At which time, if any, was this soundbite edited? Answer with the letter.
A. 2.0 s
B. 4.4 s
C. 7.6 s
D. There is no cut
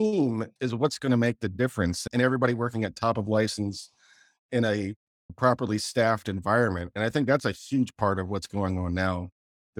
A